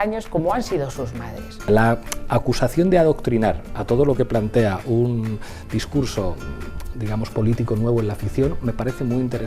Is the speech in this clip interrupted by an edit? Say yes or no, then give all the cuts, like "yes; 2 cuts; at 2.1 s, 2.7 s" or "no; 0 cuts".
yes; 1 cut; at 1.6 s